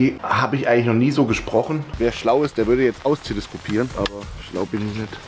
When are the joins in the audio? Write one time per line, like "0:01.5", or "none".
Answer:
0:01.8
0:03.9